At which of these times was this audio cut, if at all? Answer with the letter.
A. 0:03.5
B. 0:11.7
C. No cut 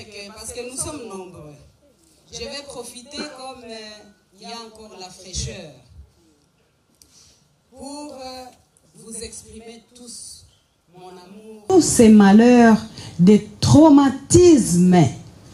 B